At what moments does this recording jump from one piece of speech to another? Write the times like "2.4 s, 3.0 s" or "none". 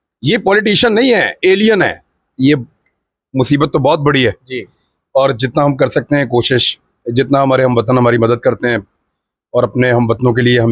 2.3 s